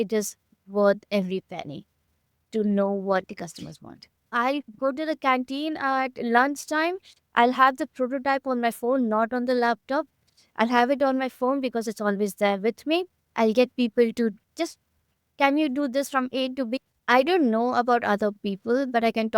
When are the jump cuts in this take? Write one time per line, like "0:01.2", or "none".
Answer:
0:04.3
0:16.8